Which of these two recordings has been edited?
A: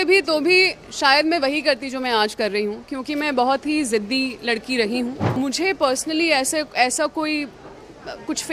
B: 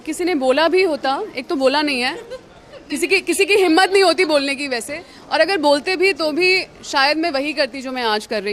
A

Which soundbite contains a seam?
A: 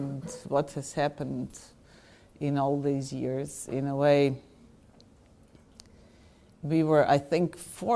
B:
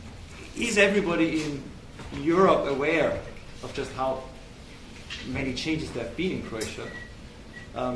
A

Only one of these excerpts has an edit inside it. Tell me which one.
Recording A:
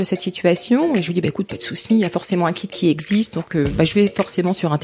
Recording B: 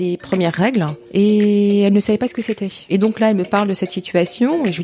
B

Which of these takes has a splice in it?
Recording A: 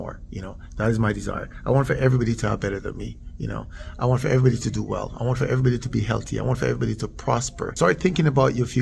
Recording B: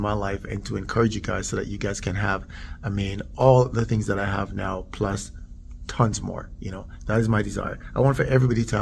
A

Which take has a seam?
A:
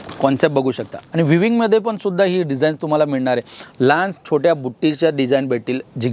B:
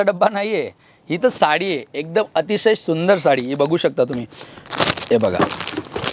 A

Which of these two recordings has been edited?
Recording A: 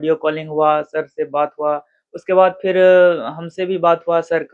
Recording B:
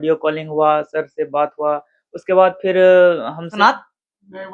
B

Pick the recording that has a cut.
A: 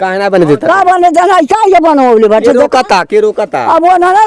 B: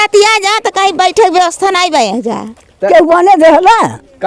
B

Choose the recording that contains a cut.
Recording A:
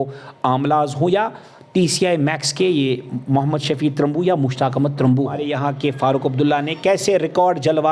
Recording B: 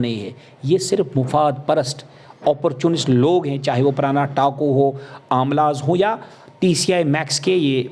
A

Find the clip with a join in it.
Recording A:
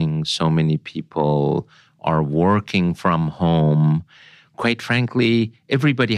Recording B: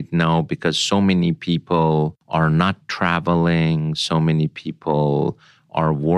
B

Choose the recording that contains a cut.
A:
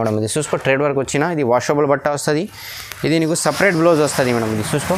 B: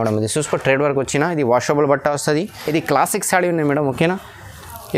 B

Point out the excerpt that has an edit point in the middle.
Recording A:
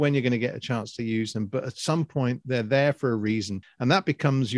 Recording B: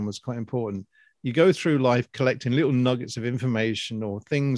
A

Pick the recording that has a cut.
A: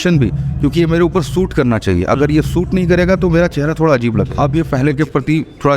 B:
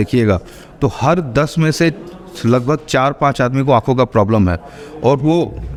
A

